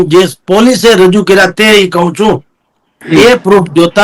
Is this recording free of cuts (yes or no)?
yes